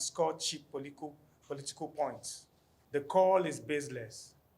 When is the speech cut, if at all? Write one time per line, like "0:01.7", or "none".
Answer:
0:03.1